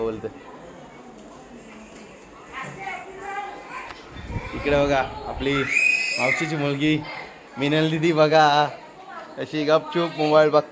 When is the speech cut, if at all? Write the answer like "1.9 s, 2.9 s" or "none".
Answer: none